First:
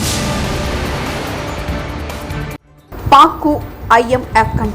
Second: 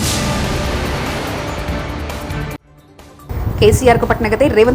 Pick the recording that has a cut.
first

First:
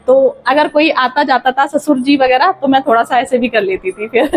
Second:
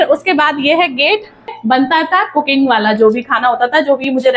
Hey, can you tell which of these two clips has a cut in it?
second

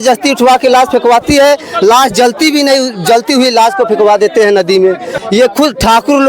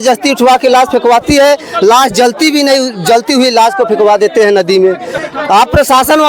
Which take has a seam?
first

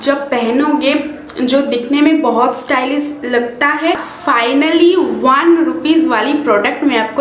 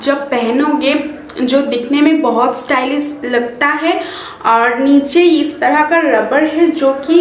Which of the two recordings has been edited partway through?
first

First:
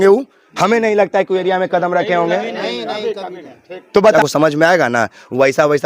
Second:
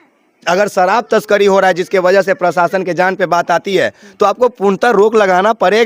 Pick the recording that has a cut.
first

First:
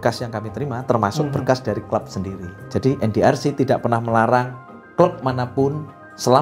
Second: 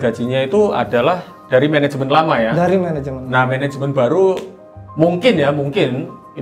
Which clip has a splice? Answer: first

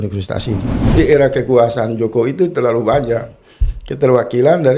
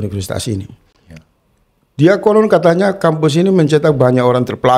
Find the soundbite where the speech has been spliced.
first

